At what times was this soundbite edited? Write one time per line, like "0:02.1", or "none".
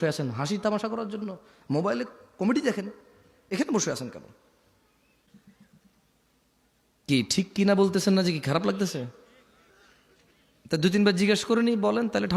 0:05.3